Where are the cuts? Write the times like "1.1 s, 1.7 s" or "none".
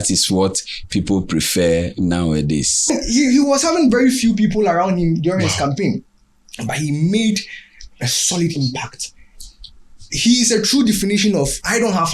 2.9 s